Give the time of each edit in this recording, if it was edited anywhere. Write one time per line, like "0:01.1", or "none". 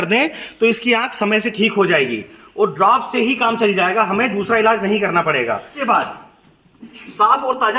0:05.7